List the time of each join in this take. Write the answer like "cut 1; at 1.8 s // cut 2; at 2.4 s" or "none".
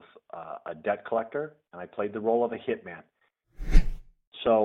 cut 1; at 3.7 s